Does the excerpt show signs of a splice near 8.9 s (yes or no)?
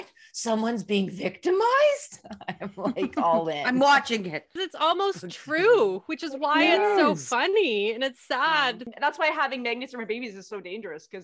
yes